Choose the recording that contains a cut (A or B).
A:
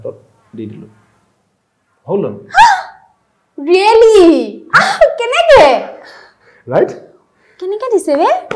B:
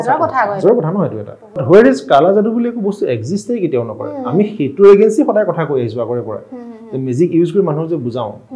B